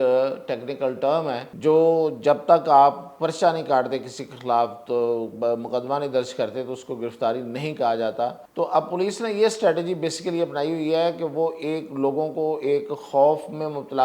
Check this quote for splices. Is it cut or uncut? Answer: cut